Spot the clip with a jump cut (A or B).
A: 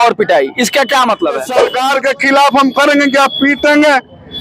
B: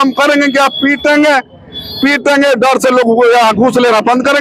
A